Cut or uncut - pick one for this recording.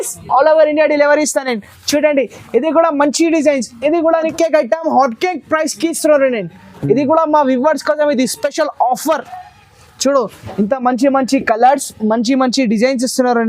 cut